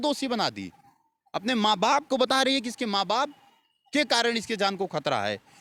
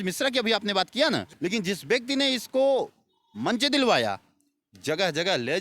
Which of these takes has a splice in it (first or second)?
second